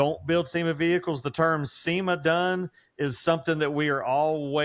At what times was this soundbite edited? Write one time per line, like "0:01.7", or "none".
none